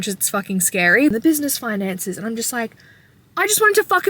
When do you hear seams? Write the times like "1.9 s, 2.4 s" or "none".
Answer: 1.1 s